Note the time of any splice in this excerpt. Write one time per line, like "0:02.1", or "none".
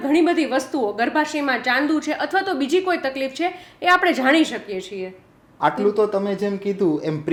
none